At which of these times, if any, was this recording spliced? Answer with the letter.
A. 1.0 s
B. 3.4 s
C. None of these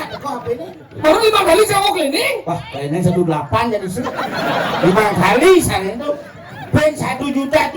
A